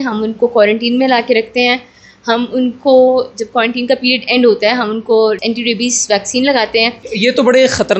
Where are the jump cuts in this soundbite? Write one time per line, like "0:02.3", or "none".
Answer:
0:05.4
0:07.1

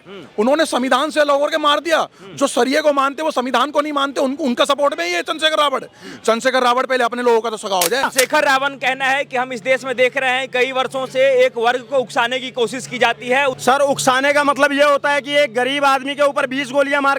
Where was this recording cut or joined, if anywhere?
0:08.0
0:13.6

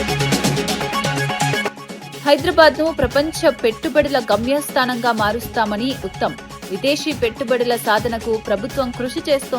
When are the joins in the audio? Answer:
0:01.8

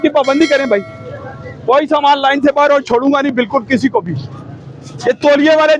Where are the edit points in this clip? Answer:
none

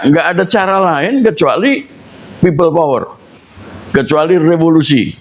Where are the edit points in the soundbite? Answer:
none

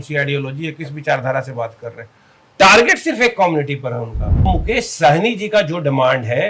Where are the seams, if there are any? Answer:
0:04.5

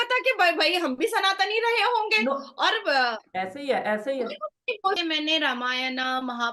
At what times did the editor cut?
none

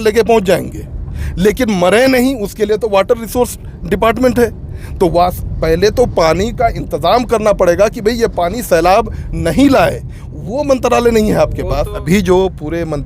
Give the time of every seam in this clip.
0:11.9

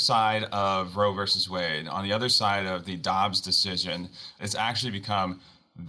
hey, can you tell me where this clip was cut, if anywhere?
0:04.4

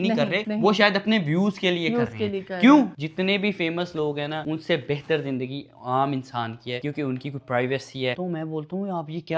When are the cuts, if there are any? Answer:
0:02.9
0:08.1

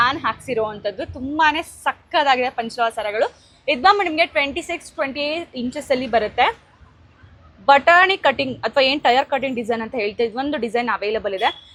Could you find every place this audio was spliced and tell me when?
none

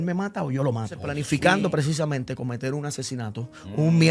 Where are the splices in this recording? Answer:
0:01.1

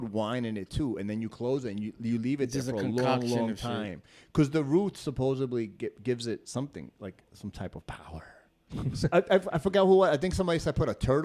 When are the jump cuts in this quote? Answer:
0:08.6

